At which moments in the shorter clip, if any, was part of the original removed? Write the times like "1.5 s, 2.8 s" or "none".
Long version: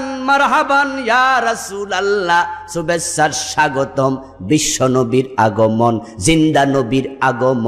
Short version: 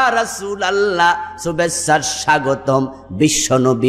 none